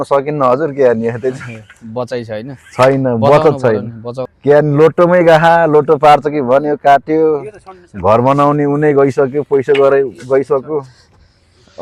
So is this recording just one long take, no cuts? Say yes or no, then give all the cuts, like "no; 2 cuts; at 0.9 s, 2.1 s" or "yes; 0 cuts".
yes; 0 cuts